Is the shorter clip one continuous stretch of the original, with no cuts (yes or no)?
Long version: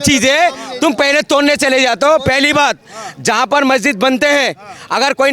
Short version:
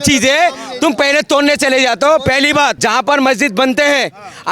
no